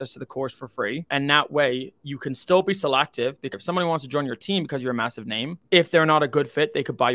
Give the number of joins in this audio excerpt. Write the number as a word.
three